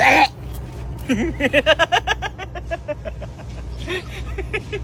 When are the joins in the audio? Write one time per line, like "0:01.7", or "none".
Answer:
none